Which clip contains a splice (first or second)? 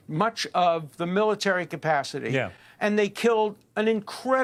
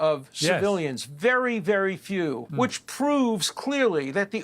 second